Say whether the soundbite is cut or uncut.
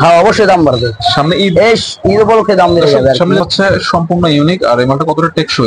cut